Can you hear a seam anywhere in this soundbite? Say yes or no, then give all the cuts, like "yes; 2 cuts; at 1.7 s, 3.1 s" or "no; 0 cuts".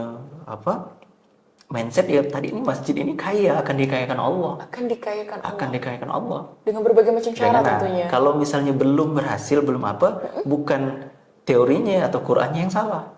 no; 0 cuts